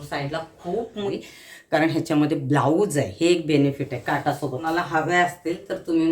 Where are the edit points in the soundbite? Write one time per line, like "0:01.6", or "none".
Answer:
0:01.3
0:04.6